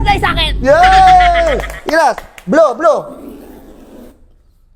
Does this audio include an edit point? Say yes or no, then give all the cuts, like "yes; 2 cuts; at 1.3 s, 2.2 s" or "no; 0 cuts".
no; 0 cuts